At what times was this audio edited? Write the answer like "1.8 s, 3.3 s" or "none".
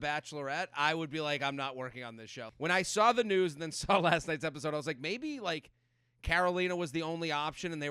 2.4 s